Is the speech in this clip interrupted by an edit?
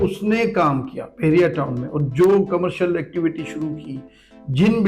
no; 0 cuts

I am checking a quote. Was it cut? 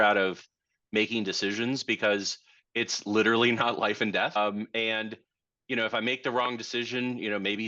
yes; 1 cut; at 4.4 s

